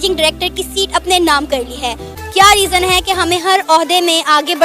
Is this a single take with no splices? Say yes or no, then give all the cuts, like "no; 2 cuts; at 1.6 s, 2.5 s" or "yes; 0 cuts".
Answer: no; 1 cut; at 2.1 s